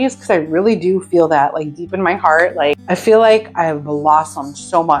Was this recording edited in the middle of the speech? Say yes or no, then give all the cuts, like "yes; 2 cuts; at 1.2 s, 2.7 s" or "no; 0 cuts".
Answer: yes; 1 cut; at 2.8 s